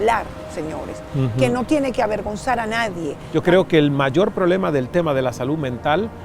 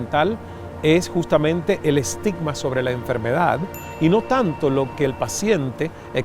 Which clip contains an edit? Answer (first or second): first